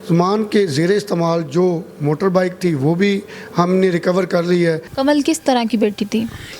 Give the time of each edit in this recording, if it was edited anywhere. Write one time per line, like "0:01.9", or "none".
0:04.9

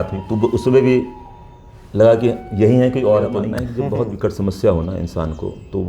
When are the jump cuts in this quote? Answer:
0:03.6

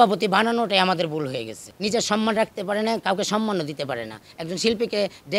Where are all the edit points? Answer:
0:01.7

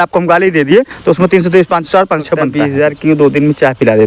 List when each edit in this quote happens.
0:02.5

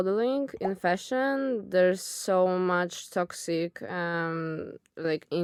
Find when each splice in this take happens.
none

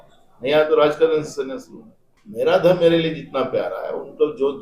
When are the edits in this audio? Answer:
0:02.2

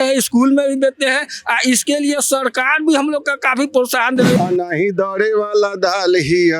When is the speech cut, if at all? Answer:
0:04.4

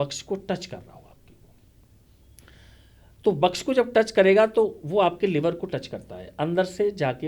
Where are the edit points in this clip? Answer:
none

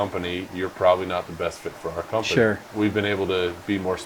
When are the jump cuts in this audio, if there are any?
0:02.6

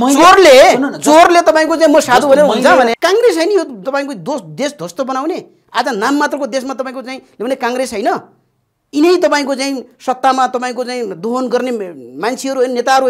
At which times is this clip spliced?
0:02.9

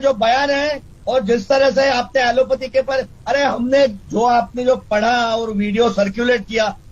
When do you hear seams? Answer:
none

